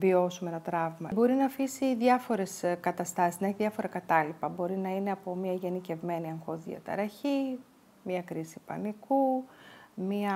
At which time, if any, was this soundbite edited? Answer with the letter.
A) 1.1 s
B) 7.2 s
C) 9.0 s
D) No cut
A